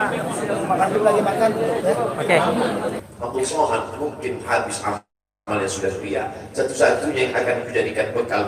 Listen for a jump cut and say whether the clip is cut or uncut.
cut